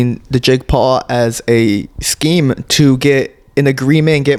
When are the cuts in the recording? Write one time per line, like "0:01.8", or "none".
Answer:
none